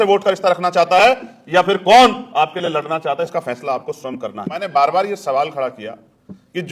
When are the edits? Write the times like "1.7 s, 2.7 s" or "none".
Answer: 4.5 s